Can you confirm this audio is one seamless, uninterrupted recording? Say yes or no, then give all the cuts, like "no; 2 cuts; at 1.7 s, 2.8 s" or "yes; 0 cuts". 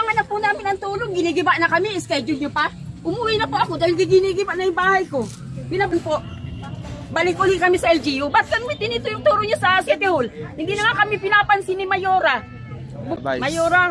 no; 2 cuts; at 5.9 s, 13.2 s